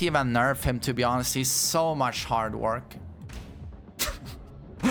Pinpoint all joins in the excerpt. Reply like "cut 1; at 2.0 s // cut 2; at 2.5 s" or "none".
none